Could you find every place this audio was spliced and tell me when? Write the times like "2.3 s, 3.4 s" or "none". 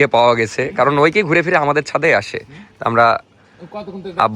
none